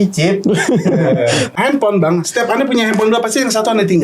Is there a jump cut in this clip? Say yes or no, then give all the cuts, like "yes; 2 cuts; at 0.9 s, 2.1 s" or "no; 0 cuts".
yes; 1 cut; at 1.5 s